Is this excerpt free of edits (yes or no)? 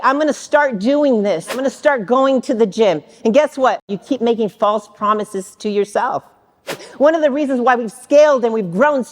no